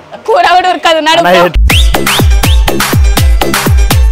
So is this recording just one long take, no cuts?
yes; 0 cuts

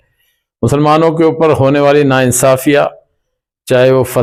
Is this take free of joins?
yes; 0 cuts

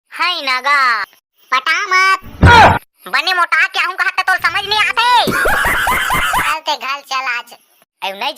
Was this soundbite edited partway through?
yes; 1 cut; at 6.5 s

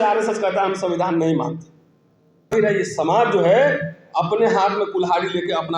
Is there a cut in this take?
yes; 1 cut; at 2.5 s

